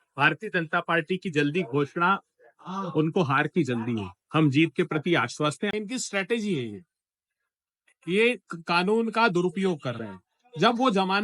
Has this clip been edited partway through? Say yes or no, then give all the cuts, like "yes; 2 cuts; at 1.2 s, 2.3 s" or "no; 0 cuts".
yes; 1 cut; at 5.7 s